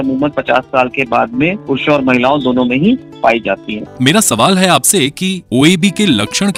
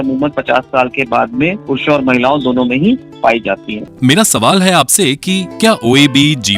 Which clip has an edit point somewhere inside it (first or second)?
second